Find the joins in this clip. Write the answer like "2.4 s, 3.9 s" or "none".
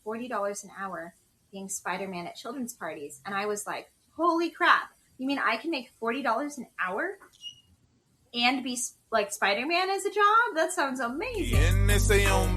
11.5 s